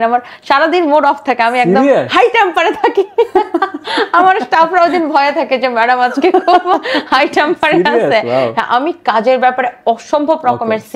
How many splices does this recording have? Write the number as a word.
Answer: zero